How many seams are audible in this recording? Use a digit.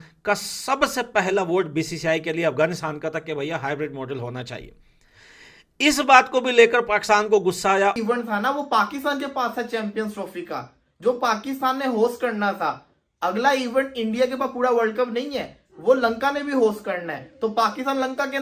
1